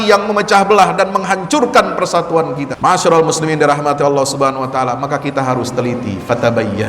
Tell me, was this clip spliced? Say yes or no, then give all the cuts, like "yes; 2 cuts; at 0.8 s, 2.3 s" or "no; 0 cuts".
yes; 1 cut; at 2.7 s